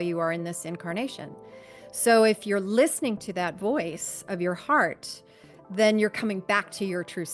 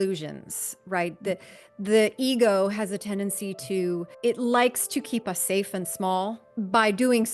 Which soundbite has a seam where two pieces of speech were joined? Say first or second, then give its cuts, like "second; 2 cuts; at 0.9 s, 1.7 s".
second; 2 cuts; at 4.1 s, 6.4 s